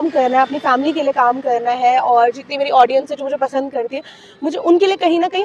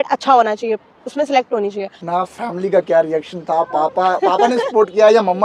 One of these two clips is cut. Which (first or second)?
second